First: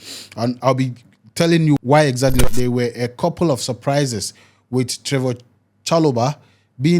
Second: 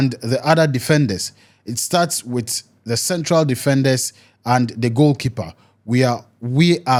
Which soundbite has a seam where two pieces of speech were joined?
first; 1 cut; at 2.4 s

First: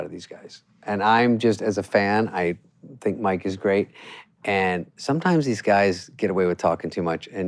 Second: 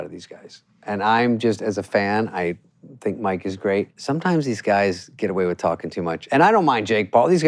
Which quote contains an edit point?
second; 2 cuts; at 4.0 s, 6.2 s

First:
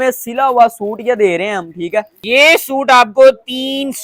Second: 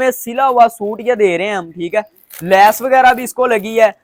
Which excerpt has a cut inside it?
first; 1 cut; at 2.2 s

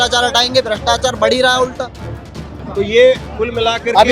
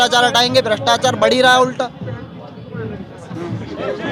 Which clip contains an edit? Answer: first; 1 cut; at 2.6 s

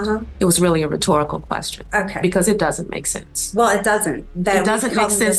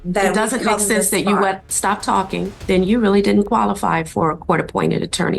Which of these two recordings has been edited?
second; 1 cut; at 2.5 s

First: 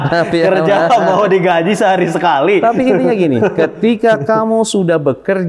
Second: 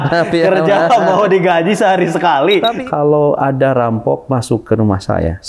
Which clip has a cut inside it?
second; 1 cut; at 2.8 s

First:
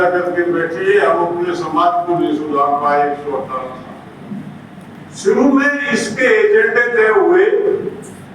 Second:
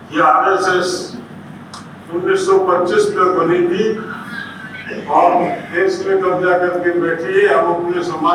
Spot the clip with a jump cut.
first; 1 cut; at 5.0 s

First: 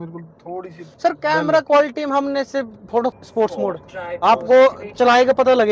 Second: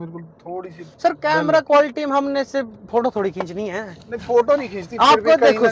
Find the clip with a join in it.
first; 1 cut; at 3.1 s

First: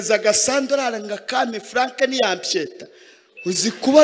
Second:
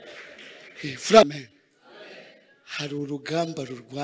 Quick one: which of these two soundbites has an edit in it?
second; 1 cut; at 1.3 s

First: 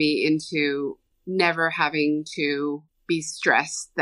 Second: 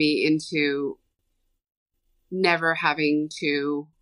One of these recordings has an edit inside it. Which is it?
first; 2 cuts; at 1.1 s, 2.9 s

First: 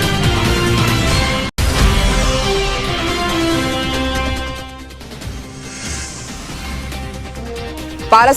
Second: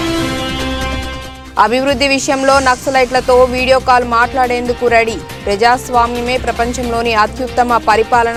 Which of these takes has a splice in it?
first; 2 cuts; at 1.6 s, 6.4 s

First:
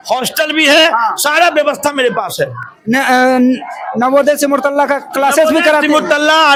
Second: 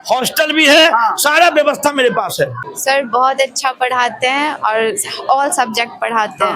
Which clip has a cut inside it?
second; 1 cut; at 2.7 s

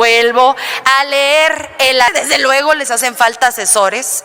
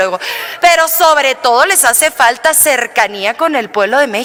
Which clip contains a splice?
first; 1 cut; at 2.1 s

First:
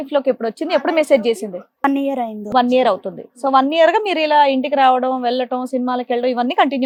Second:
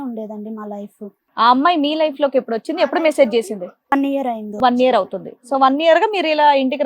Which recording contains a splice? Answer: second; 1 cut; at 1.1 s

